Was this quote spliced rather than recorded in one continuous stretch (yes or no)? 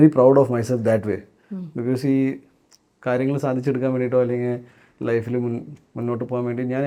no